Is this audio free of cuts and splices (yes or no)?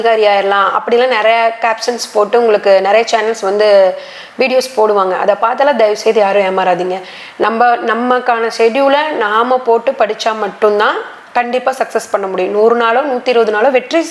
yes